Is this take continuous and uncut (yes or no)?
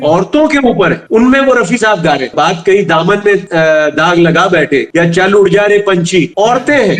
yes